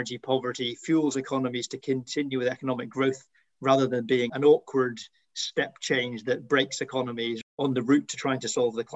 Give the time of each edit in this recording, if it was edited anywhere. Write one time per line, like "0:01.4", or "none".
none